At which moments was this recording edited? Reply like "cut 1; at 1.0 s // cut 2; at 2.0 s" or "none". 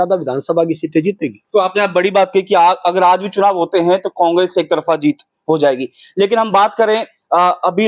none

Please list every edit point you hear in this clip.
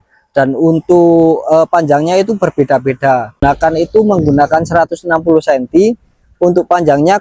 cut 1; at 3.4 s

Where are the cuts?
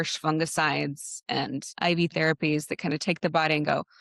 cut 1; at 1.7 s

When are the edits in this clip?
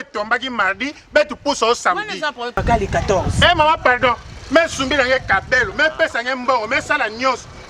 cut 1; at 2.6 s

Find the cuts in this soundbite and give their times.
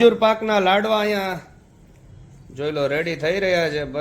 none

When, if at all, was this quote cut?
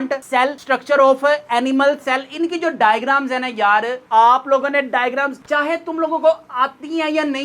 none

